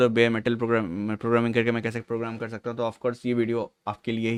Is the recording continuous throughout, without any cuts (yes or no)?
yes